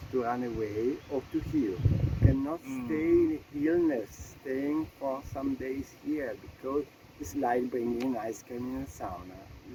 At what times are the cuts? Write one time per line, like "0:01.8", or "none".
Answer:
none